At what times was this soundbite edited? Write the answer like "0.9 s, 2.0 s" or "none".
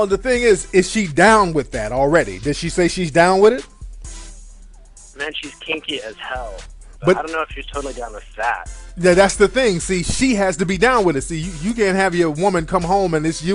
3.4 s